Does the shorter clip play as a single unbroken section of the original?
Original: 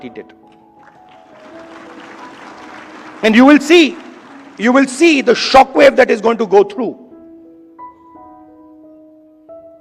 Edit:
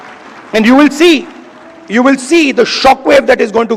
yes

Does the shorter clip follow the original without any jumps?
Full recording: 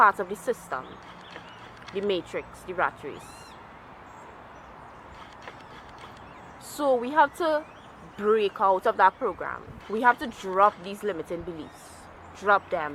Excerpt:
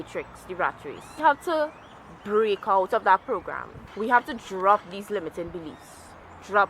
no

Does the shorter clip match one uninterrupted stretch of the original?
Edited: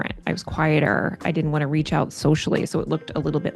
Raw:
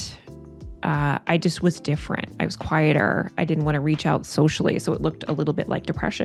yes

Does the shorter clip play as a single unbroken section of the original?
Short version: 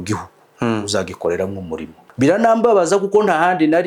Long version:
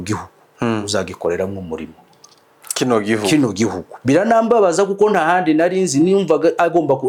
no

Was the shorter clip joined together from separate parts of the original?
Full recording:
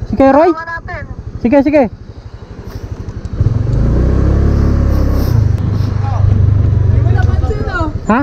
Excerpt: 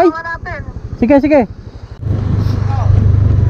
yes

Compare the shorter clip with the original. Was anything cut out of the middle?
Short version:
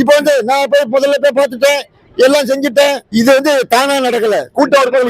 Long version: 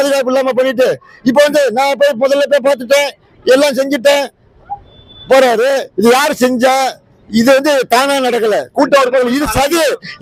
yes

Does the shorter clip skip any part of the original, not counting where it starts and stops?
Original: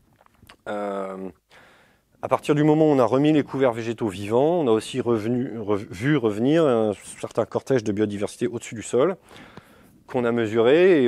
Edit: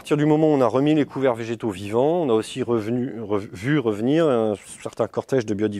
no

